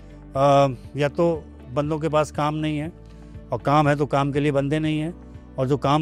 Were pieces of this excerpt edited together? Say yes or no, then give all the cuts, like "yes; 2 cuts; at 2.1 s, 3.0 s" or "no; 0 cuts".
no; 0 cuts